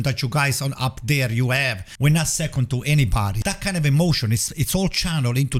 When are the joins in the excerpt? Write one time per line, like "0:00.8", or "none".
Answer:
0:01.8
0:03.4

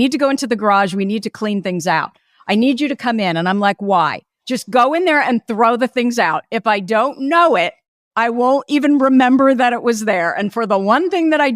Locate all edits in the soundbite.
0:08.0

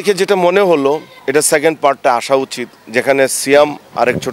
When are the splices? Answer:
0:01.1

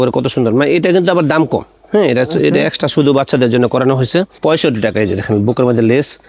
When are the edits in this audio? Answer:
none

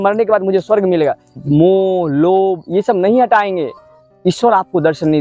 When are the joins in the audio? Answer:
0:01.3

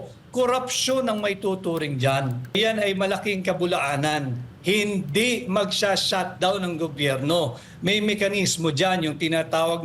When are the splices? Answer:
0:02.6

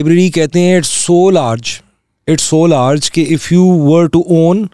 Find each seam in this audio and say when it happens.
none

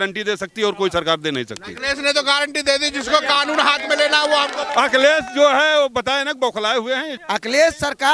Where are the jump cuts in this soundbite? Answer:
0:04.7
0:07.1

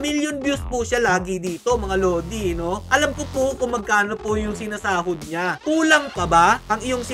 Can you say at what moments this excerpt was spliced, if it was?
0:05.6

